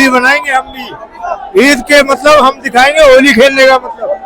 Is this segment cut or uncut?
uncut